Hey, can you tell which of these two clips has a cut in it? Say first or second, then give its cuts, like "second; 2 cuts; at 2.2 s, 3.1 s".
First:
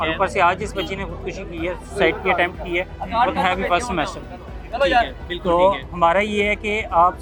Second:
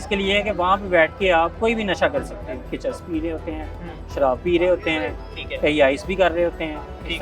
second; 2 cuts; at 1.5 s, 2.7 s